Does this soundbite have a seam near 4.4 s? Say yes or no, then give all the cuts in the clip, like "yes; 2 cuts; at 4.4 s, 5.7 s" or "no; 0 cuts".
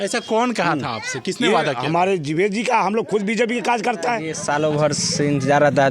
yes; 1 cut; at 4.4 s